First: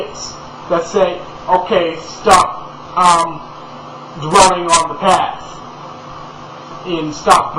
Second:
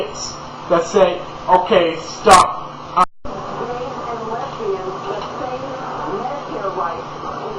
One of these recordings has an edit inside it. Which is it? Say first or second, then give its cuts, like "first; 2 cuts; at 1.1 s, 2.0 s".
first; 1 cut; at 3.0 s